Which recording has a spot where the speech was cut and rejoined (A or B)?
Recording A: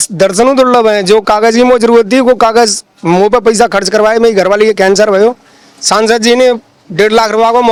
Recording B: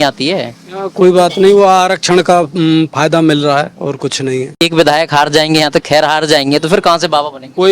B